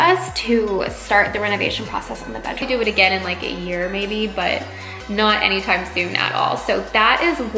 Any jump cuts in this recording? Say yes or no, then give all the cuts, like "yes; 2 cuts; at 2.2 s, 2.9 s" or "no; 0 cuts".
yes; 1 cut; at 2.6 s